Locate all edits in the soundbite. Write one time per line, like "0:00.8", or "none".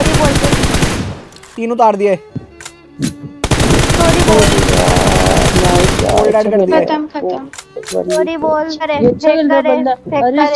0:08.8